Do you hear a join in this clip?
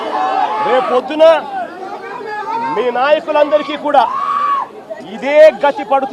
no; 0 cuts

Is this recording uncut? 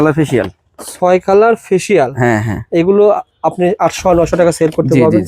yes; 0 cuts

